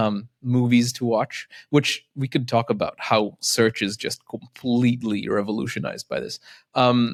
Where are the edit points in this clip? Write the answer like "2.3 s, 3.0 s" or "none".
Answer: none